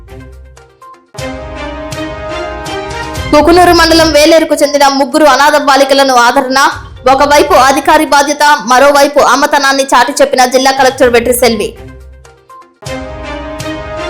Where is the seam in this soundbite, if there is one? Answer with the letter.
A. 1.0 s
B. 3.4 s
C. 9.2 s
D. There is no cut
A